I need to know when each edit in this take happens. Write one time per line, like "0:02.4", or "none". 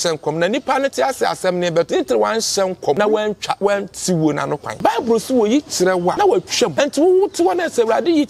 0:03.0
0:04.7
0:06.3